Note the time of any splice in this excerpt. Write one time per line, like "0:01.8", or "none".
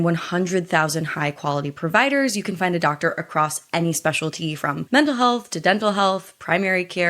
0:04.8